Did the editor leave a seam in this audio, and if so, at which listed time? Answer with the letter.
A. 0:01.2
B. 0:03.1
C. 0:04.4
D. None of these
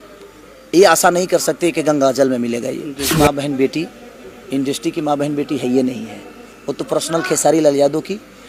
B